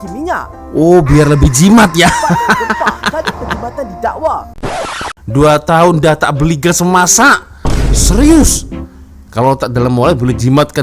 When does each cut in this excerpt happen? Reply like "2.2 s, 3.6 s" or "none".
5.0 s